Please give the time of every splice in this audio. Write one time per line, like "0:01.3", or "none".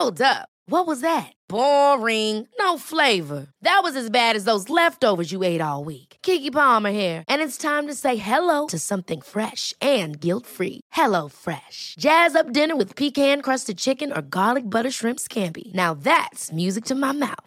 none